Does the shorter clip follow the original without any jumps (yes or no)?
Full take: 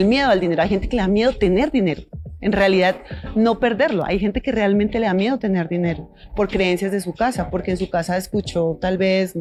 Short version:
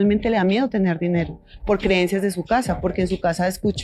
yes